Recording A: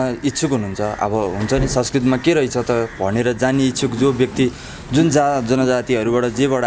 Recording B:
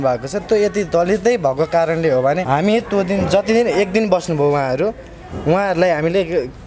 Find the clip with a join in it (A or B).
B